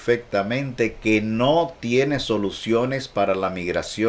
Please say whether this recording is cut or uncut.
uncut